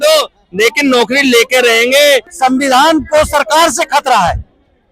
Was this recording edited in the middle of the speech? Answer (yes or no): yes